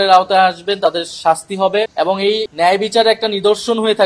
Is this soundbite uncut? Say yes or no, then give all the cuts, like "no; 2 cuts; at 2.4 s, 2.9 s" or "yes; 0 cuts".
no; 1 cut; at 2.1 s